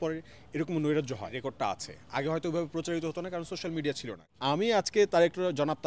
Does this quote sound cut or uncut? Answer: cut